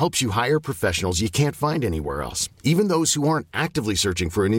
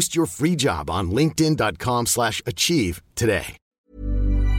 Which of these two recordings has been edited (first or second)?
second